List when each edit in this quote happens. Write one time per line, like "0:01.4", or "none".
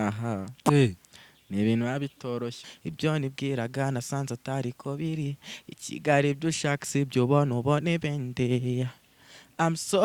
0:02.7

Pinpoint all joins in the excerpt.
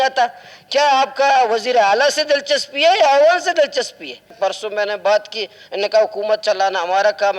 0:04.4

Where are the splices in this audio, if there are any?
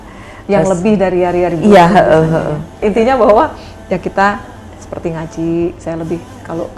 0:02.8

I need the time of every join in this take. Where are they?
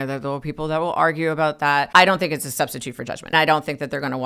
0:01.7
0:03.3

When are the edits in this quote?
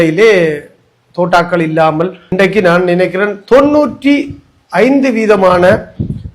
0:02.2

